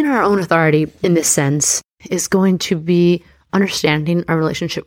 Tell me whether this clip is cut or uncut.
cut